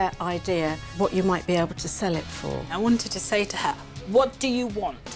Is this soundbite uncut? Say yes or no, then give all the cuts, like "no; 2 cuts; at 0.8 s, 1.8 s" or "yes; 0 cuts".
no; 2 cuts; at 1.0 s, 2.7 s